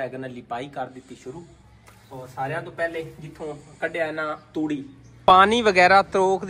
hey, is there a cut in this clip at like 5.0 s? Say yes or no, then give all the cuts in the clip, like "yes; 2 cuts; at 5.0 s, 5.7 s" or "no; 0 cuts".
yes; 1 cut; at 5.0 s